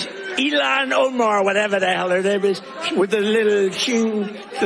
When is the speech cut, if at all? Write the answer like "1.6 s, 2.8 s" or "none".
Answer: 2.7 s